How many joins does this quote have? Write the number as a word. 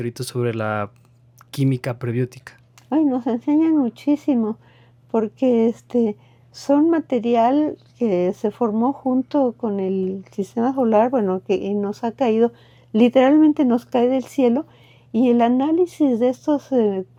zero